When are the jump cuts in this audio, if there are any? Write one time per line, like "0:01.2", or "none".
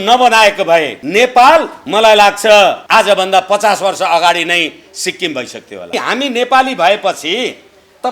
0:01.0
0:01.8
0:02.8
0:05.9